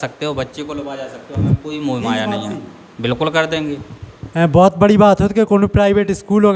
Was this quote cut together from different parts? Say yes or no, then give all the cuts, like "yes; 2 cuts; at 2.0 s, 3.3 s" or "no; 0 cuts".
no; 0 cuts